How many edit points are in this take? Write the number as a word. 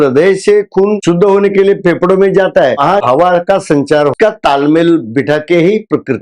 two